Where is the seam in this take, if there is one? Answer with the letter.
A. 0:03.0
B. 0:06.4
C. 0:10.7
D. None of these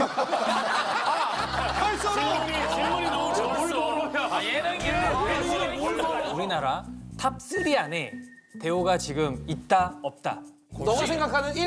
B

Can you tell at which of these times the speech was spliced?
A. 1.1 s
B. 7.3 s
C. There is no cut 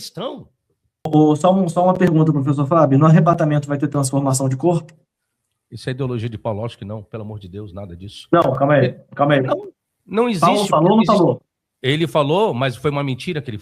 A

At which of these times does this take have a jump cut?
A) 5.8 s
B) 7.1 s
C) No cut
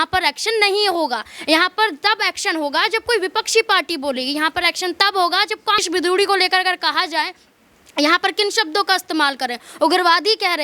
A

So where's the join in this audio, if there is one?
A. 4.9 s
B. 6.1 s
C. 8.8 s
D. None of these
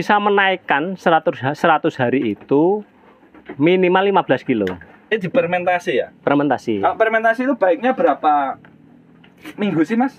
A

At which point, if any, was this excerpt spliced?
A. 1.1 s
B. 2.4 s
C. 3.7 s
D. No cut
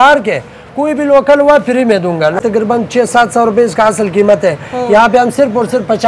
B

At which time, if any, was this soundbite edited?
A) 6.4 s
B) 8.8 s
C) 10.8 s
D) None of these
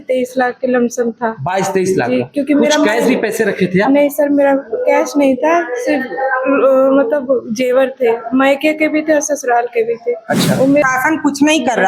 C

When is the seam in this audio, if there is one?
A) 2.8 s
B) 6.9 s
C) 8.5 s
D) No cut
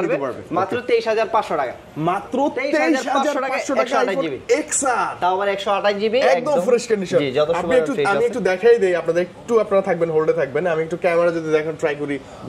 D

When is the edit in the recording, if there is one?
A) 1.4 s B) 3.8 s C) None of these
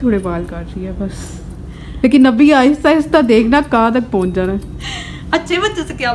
C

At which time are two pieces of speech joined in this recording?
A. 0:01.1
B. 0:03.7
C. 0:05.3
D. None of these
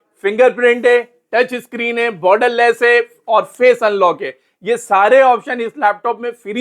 D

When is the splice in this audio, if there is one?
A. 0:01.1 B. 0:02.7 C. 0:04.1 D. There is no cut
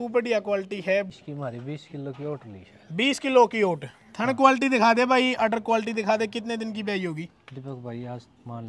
A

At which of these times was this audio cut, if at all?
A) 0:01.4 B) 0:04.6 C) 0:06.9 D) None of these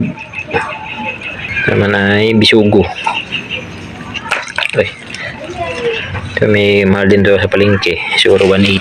A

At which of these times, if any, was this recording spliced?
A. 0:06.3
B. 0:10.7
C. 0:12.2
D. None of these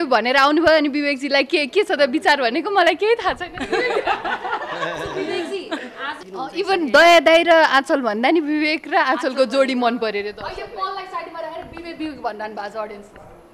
A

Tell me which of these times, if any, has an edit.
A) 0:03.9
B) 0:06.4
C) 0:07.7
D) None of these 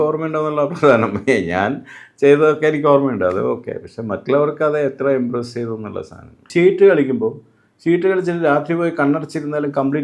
B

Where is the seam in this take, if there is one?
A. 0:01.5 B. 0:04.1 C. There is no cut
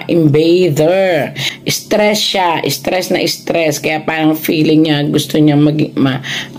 A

